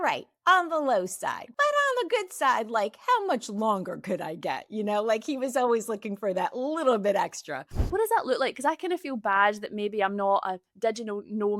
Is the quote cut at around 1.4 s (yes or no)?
yes